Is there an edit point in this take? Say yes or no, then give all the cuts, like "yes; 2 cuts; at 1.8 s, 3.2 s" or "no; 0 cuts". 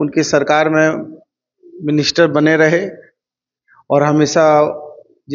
no; 0 cuts